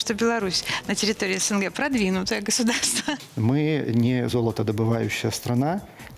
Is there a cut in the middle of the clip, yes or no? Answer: yes